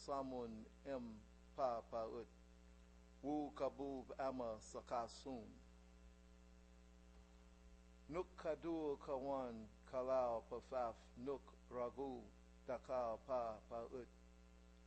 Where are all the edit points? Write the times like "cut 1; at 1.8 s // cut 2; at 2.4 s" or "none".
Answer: cut 1; at 9.0 s